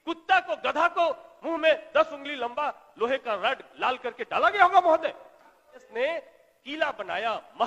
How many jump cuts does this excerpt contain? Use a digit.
1